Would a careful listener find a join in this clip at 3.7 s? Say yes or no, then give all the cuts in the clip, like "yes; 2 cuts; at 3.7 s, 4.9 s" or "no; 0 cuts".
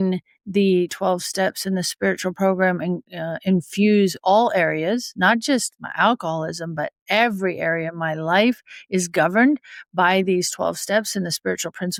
no; 0 cuts